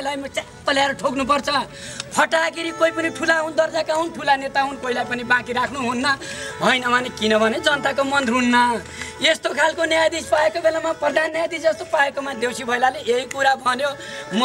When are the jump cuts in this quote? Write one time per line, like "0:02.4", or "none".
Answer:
none